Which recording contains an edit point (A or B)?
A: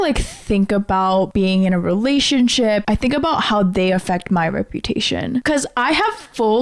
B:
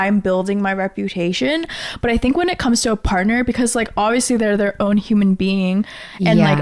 A